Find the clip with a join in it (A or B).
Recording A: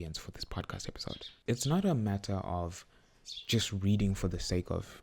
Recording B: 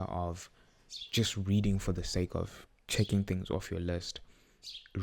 A